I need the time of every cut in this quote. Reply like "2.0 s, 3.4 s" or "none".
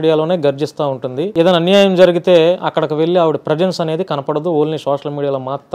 1.2 s